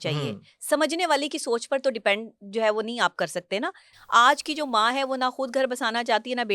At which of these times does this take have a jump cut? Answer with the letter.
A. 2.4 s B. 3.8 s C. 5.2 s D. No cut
B